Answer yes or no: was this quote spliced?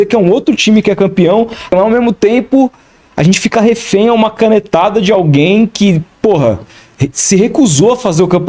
no